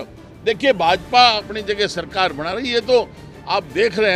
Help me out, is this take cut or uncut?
uncut